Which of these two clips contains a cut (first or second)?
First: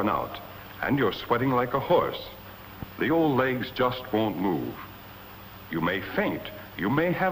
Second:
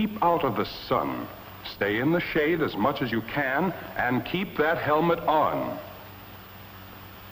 second